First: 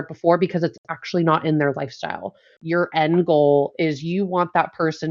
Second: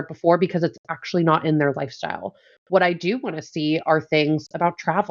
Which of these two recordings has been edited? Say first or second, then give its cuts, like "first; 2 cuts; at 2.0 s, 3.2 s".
first; 1 cut; at 2.5 s